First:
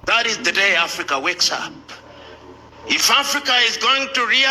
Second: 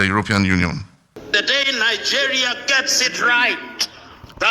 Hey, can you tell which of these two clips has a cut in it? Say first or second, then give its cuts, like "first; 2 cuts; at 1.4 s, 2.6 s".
second; 1 cut; at 1.2 s